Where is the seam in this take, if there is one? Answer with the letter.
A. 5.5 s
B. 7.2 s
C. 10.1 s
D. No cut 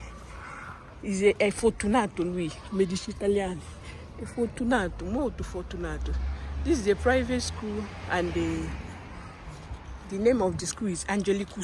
D